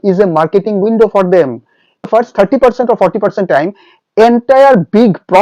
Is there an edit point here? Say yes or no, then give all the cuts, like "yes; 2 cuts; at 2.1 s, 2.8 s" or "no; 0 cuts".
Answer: yes; 1 cut; at 2.1 s